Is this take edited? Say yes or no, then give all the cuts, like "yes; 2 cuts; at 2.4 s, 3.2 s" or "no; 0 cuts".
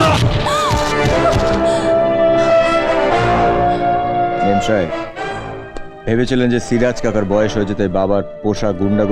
no; 0 cuts